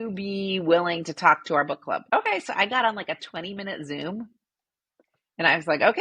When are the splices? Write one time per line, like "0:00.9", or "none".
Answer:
0:02.0